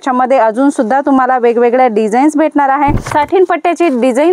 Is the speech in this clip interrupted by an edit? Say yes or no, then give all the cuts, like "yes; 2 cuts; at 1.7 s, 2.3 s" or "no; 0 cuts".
yes; 1 cut; at 3.1 s